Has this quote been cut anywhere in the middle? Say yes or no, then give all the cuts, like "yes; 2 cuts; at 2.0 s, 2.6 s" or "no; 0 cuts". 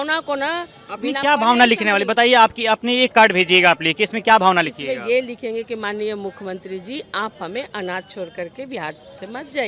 no; 0 cuts